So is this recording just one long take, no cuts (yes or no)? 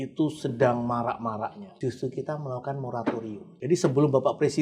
no